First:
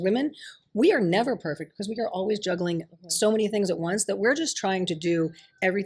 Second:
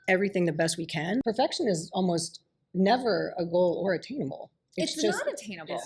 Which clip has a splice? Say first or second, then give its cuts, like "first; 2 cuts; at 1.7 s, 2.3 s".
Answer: second; 1 cut; at 1.2 s